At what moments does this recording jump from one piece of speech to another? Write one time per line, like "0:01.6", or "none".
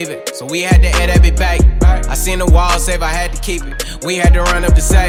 none